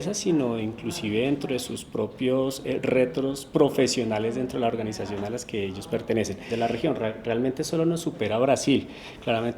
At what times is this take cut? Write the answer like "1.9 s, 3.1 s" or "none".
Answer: 6.4 s

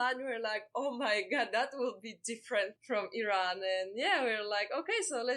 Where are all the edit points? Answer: 2.8 s

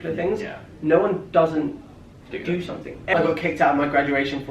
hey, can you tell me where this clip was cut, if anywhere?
3.1 s

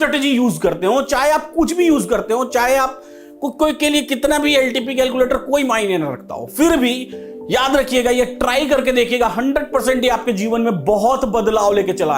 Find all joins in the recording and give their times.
none

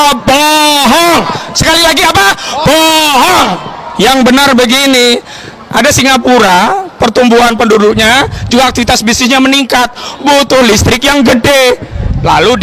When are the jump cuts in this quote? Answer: none

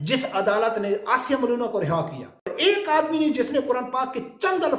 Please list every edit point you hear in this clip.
2.5 s

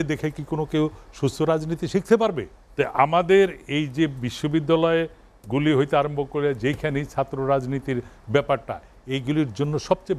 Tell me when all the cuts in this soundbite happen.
2.6 s

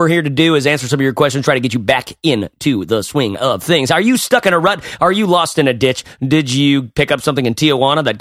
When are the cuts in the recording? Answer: none

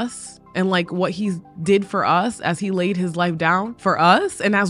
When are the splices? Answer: 3.7 s

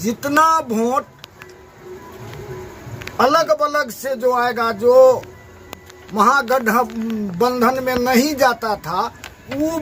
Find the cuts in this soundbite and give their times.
none

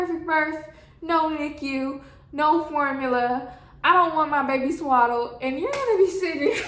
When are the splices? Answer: none

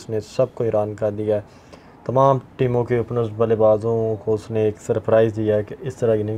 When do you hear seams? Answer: none

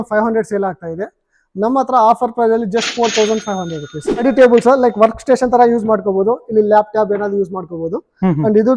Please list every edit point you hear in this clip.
4.2 s

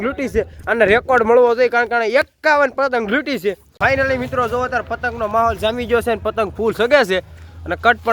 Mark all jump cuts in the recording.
3.7 s

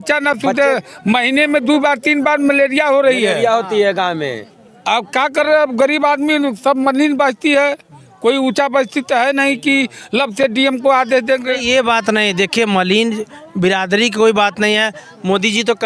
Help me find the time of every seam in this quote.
none

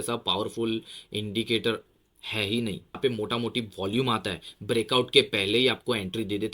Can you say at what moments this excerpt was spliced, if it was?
2.9 s

